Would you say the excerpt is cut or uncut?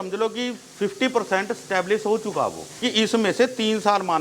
cut